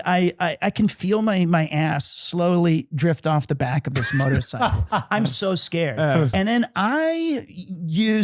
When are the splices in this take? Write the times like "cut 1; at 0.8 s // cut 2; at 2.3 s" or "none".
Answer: cut 1; at 6.3 s

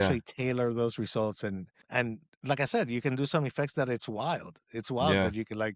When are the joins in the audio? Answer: cut 1; at 1.7 s

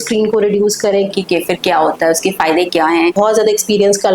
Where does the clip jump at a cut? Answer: cut 1; at 1.1 s // cut 2; at 3.1 s

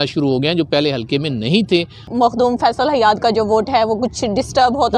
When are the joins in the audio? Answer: cut 1; at 2.1 s

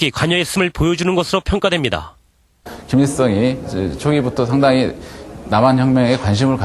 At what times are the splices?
cut 1; at 4.8 s

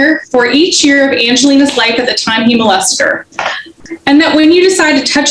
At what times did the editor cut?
cut 1; at 3.7 s

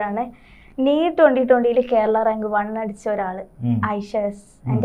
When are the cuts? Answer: none

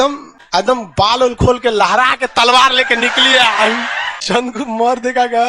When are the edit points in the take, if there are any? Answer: cut 1; at 4.6 s

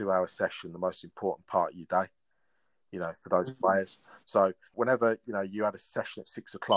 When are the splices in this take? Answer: cut 1; at 4.7 s

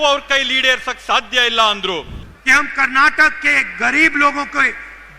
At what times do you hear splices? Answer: cut 1; at 2.1 s

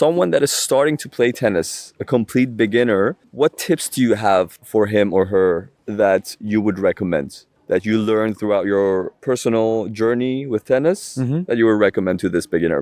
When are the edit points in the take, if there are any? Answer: none

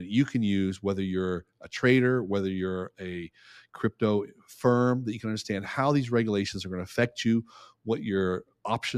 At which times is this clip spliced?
none

